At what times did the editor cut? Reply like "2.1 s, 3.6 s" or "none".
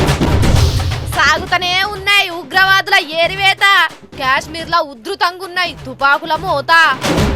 1.0 s

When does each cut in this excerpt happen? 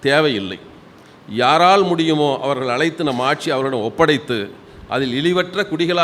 none

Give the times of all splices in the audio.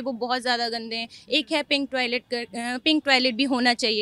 none

